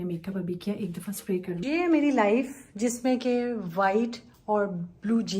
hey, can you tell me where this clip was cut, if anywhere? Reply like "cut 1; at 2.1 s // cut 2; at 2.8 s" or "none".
cut 1; at 1.6 s